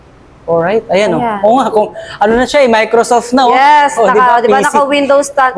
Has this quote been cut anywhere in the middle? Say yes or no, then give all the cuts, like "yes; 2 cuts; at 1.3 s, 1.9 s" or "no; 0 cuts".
no; 0 cuts